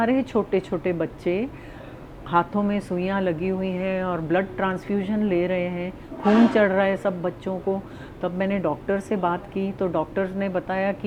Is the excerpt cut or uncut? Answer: uncut